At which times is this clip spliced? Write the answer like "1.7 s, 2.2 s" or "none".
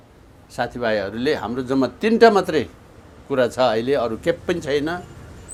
none